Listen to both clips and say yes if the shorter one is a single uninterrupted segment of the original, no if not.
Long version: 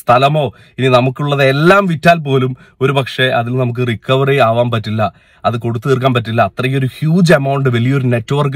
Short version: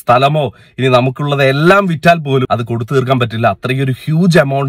no